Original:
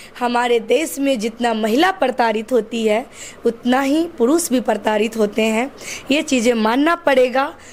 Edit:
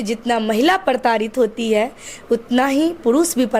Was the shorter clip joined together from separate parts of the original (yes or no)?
no